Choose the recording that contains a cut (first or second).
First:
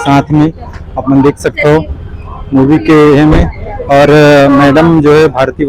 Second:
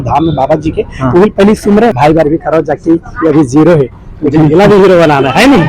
second